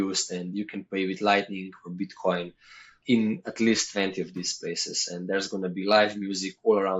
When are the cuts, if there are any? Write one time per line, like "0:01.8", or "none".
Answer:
0:02.9